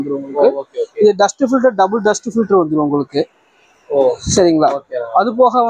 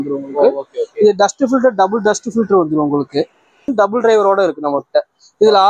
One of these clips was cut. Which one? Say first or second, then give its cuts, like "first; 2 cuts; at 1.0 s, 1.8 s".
second; 1 cut; at 3.6 s